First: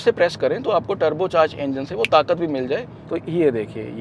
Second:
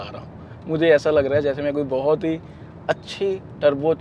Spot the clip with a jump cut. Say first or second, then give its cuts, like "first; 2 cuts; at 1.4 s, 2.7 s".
first; 1 cut; at 2.8 s